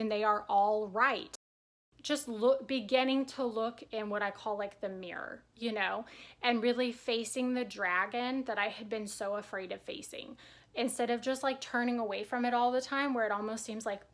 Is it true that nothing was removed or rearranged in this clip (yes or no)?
no